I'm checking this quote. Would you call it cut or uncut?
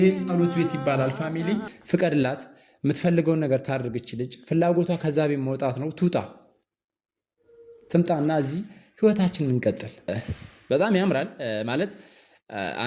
cut